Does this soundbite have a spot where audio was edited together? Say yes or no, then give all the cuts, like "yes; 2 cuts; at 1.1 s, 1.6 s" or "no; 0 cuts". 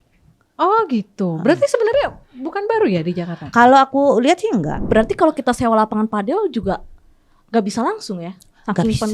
yes; 1 cut; at 4.9 s